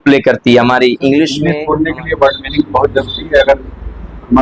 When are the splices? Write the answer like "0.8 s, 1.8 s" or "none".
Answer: 1.4 s